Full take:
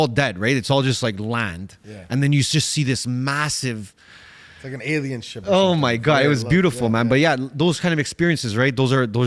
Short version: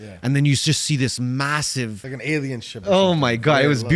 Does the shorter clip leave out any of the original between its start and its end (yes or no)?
yes